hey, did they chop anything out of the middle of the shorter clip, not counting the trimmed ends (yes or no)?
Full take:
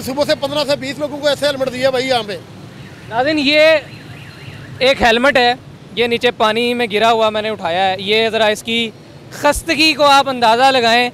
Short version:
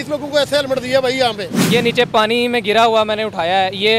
yes